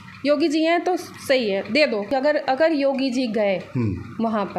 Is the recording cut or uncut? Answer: cut